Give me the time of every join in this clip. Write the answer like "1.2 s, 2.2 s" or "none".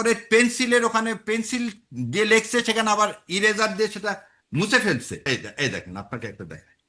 5.3 s